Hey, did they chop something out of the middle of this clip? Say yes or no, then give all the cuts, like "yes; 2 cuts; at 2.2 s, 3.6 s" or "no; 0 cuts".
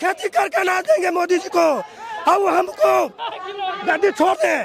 no; 0 cuts